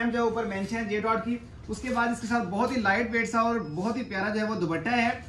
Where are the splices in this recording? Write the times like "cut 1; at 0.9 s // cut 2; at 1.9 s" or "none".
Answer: none